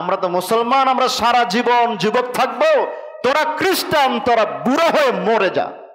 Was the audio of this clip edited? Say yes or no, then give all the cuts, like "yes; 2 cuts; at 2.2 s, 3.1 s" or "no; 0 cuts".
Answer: no; 0 cuts